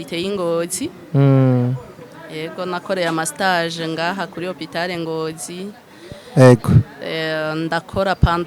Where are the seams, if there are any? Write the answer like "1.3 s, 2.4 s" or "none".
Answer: none